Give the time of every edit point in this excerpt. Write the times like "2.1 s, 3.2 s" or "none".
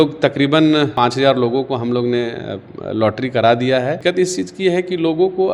0.9 s, 4.0 s